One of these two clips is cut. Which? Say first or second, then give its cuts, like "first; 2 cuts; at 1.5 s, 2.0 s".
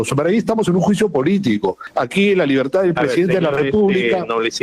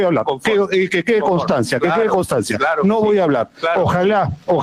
first; 1 cut; at 1.8 s